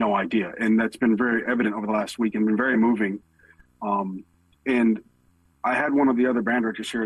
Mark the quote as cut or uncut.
uncut